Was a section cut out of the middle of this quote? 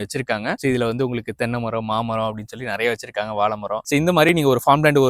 no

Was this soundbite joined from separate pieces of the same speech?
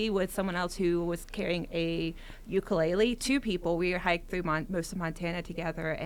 no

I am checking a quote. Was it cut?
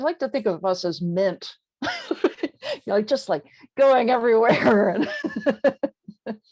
no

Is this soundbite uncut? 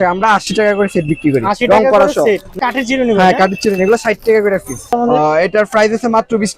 no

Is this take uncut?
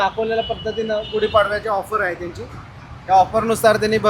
yes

